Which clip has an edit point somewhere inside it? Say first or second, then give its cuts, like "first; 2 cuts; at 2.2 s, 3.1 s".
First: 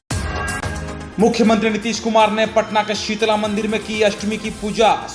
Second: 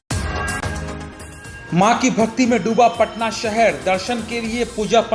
second; 1 cut; at 0.9 s